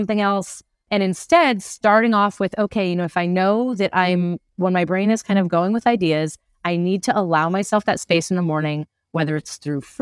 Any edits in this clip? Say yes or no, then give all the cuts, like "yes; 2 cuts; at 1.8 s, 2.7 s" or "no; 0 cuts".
no; 0 cuts